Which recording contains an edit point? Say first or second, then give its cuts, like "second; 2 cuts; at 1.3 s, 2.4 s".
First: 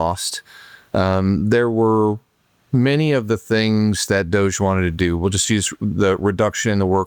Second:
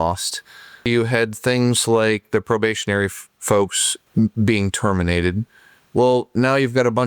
second; 2 cuts; at 0.9 s, 3.9 s